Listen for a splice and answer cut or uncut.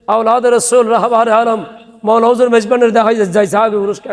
uncut